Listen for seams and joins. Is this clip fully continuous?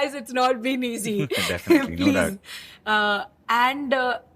yes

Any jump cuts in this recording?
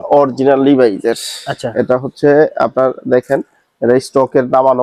no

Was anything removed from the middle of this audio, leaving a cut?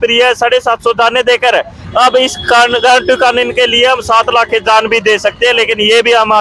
no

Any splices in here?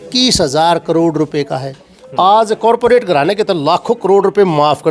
no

